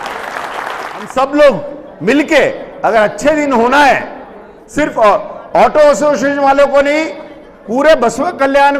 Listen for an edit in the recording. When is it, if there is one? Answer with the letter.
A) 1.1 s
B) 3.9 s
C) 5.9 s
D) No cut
A